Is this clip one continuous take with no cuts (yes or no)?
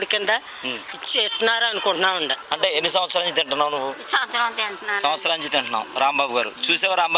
no